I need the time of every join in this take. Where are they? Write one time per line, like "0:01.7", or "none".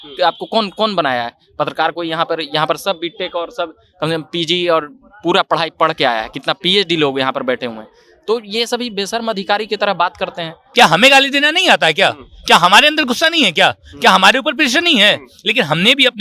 0:10.6